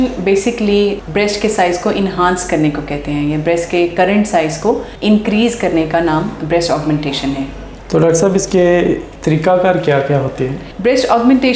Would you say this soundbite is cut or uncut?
uncut